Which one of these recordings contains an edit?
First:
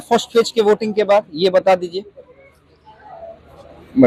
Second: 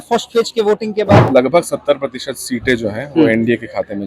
second; 1 cut; at 1.2 s

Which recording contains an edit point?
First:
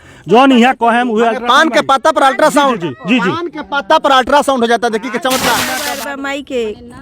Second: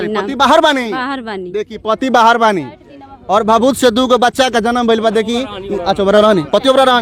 first; 1 cut; at 5.7 s

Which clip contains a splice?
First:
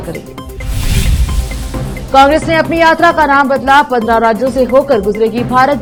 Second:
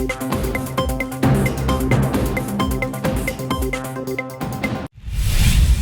second; 1 cut; at 4.8 s

